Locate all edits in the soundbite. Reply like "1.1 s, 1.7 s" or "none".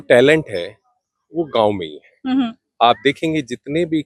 none